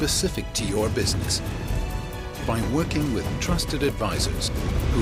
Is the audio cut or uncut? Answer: uncut